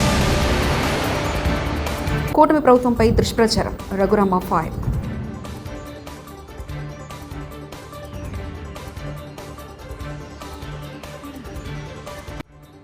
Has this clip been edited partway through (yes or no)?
no